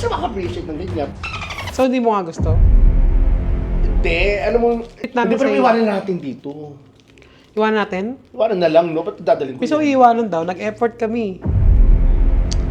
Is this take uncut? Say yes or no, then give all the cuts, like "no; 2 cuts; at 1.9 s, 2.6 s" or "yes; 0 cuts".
no; 1 cut; at 5.0 s